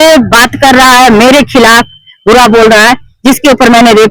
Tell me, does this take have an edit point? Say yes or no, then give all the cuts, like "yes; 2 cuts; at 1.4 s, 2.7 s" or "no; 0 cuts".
no; 0 cuts